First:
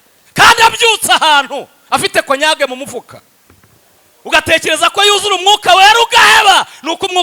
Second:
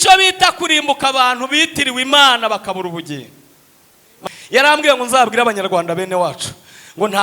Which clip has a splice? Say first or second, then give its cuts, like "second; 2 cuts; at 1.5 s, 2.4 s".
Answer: second; 1 cut; at 4.1 s